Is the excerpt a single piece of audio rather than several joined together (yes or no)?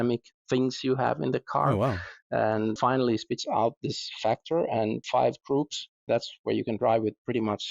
no